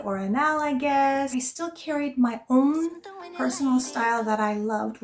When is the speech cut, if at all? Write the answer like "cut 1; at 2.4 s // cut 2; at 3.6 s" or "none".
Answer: cut 1; at 1.3 s